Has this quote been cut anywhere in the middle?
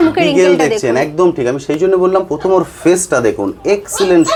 no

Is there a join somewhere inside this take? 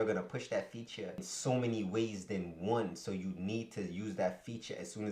yes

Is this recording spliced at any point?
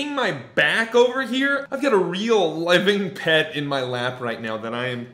yes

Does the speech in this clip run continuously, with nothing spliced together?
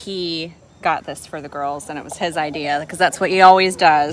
yes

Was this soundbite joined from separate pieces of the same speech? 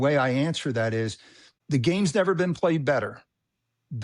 yes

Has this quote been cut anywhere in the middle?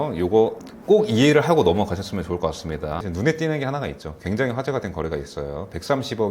yes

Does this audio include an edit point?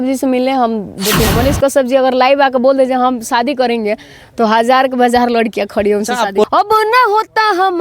yes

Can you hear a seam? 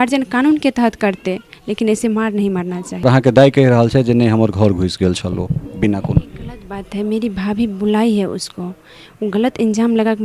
yes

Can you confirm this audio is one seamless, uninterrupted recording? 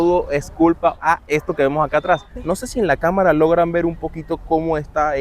no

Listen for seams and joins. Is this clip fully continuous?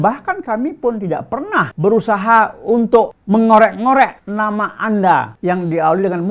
no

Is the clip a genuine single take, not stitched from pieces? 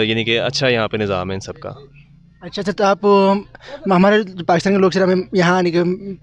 yes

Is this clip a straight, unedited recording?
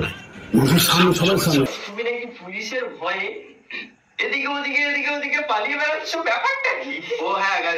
no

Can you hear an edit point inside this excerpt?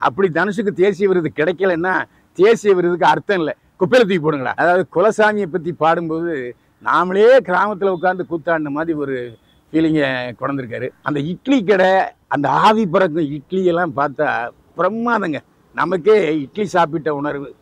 yes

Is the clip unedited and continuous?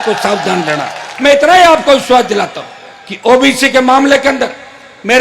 yes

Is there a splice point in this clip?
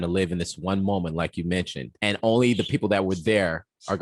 no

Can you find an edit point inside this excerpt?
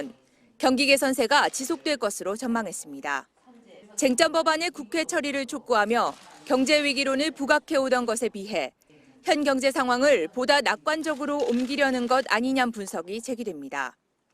yes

